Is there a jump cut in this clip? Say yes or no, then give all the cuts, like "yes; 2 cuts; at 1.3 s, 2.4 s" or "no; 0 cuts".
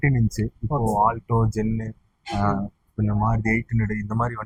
no; 0 cuts